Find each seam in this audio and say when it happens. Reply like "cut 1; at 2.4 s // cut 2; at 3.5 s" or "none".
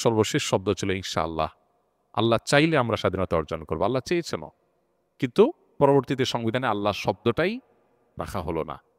none